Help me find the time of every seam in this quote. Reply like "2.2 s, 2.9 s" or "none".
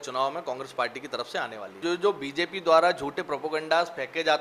1.6 s